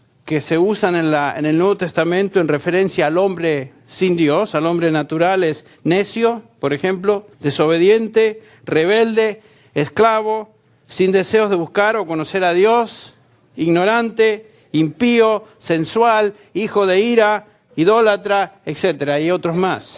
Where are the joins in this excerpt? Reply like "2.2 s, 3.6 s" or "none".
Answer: 15.3 s